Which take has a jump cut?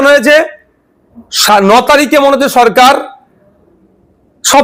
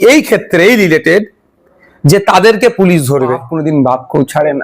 second; 1 cut; at 3.5 s

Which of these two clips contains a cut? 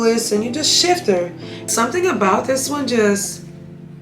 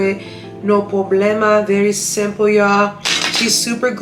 first; 1 cut; at 1.7 s

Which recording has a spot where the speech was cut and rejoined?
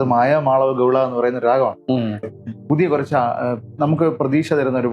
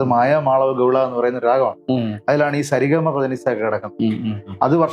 first; 1 cut; at 2.2 s

